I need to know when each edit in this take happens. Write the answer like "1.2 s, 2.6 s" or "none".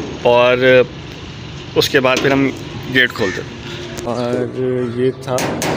4.1 s

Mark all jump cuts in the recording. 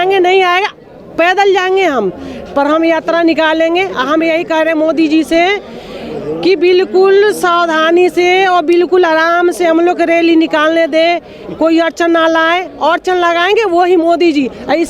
none

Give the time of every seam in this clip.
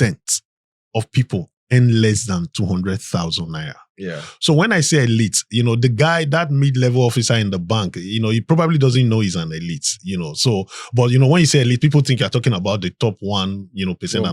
none

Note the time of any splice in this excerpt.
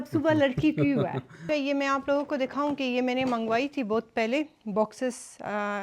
1.4 s

